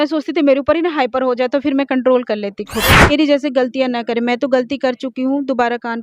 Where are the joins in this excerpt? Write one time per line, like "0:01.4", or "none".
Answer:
0:03.1